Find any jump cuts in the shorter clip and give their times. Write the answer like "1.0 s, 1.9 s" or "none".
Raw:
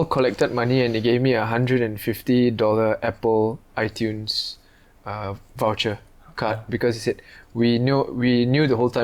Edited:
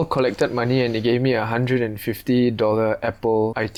none